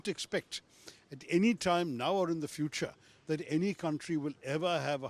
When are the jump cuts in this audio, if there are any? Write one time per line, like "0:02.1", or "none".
none